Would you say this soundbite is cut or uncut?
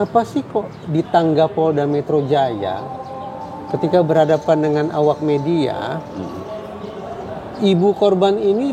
uncut